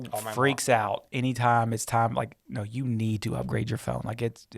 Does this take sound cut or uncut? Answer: cut